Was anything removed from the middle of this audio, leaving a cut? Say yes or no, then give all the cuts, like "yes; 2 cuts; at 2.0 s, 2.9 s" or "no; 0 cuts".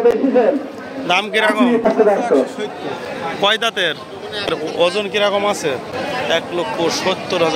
yes; 3 cuts; at 1.8 s, 4.5 s, 5.9 s